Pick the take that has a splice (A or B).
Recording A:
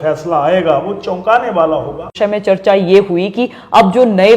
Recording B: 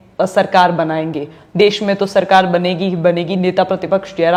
A